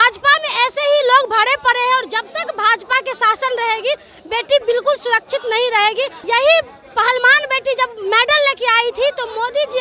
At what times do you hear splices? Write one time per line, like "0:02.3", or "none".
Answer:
0:06.2